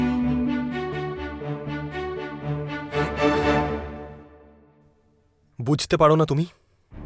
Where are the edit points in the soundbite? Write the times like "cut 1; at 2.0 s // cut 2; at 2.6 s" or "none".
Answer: cut 1; at 0.9 s